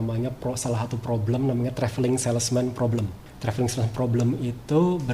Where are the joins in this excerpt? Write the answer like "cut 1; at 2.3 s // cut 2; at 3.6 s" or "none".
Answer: cut 1; at 3.2 s